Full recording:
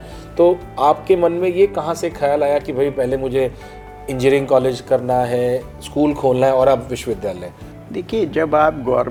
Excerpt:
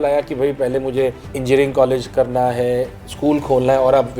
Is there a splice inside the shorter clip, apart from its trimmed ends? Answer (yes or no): yes